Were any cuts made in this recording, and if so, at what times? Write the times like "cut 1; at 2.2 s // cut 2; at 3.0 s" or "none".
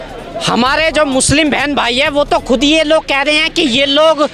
none